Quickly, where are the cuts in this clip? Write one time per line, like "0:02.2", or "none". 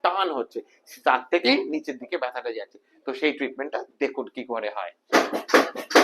0:05.1